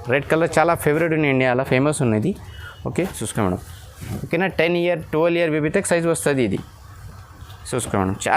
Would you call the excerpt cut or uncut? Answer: cut